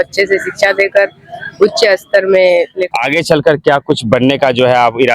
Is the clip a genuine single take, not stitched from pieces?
no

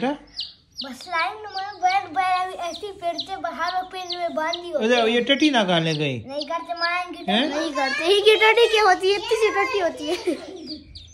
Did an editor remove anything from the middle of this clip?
no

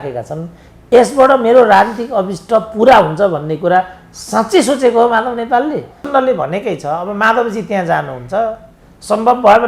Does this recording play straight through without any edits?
no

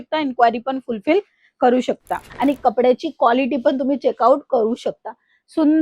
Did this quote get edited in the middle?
yes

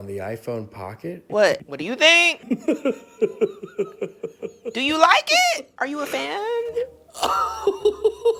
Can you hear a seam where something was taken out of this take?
no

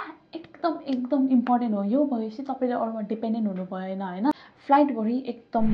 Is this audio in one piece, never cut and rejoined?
no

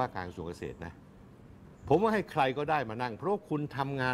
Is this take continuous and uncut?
yes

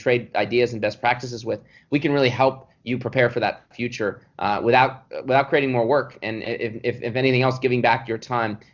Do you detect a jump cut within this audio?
no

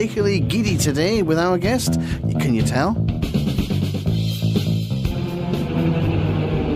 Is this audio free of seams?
yes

